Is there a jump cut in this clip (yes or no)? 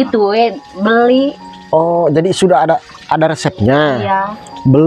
no